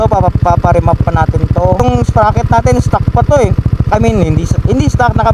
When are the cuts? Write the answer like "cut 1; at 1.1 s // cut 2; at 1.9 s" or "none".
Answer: cut 1; at 1.8 s